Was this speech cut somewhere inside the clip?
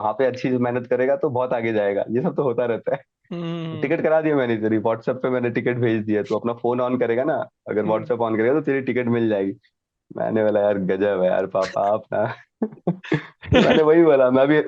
no; 0 cuts

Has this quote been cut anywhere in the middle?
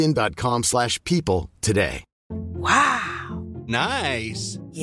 no; 0 cuts

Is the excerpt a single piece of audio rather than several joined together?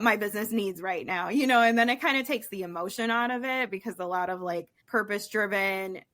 no; 1 cut; at 4.8 s

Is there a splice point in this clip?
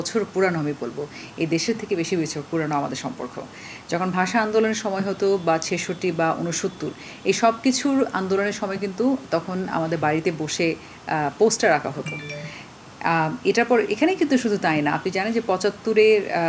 no; 0 cuts

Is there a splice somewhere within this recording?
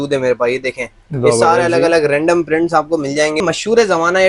yes; 1 cut; at 3.4 s

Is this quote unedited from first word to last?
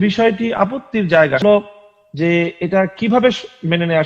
no; 1 cut; at 1.4 s

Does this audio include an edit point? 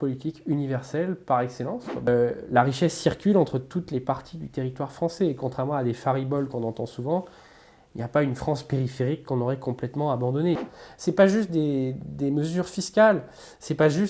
yes; 2 cuts; at 2.1 s, 10.6 s

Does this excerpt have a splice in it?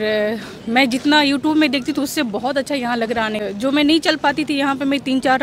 yes; 1 cut; at 3.4 s

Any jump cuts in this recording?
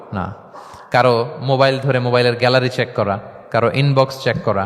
yes; 1 cut; at 3.3 s

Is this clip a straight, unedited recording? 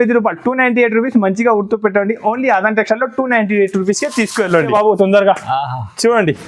no; 1 cut; at 4.7 s

